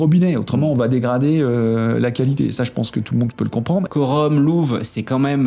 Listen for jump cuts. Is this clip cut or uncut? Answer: cut